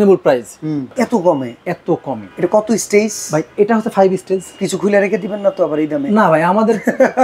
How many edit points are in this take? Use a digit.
2